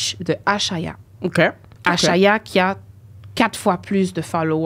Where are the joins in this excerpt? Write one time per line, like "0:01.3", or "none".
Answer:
0:01.7